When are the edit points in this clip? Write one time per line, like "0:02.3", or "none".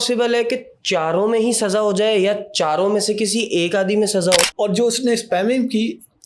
0:04.5